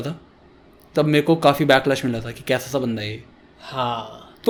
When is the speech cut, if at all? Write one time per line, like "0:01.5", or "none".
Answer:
none